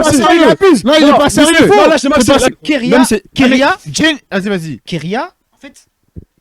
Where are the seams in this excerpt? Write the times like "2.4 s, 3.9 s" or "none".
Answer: 2.5 s